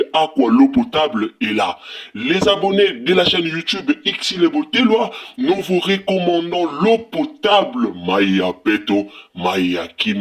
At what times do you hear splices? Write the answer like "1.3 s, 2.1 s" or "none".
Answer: none